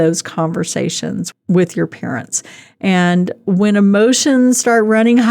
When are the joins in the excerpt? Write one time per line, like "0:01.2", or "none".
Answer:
0:01.3